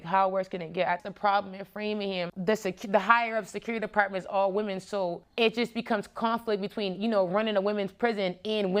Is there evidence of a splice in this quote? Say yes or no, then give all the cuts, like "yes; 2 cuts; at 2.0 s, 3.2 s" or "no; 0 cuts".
no; 0 cuts